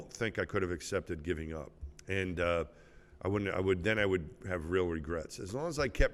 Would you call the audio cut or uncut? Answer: uncut